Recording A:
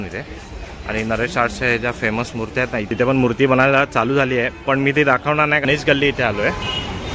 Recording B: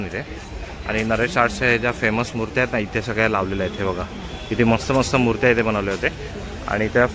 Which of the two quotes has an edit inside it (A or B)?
A